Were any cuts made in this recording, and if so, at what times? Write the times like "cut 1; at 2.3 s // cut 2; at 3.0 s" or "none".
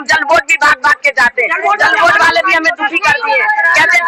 none